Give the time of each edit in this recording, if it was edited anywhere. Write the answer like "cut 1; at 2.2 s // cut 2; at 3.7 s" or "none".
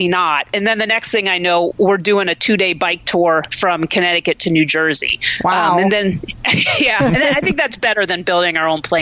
none